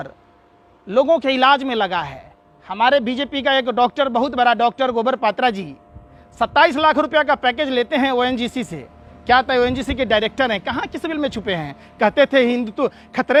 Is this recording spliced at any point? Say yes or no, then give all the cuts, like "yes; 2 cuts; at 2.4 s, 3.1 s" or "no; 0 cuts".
no; 0 cuts